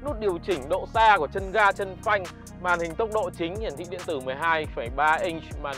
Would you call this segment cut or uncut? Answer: uncut